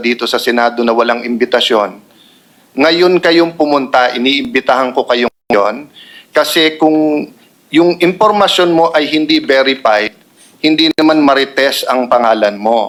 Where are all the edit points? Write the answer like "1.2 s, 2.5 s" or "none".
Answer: none